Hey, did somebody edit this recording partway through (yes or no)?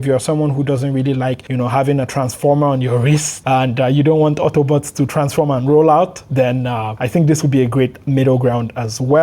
yes